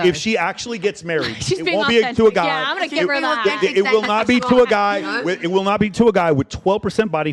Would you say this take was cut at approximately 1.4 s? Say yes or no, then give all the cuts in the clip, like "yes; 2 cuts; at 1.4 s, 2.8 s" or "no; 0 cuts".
no; 0 cuts